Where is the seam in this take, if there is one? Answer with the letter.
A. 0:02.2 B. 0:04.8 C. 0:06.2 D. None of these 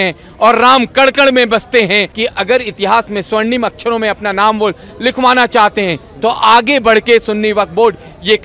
A